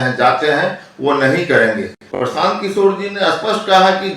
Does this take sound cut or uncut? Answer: cut